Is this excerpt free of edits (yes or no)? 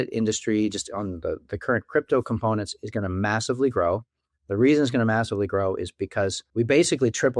no